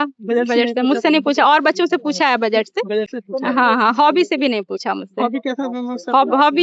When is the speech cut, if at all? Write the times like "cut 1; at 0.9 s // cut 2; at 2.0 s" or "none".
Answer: none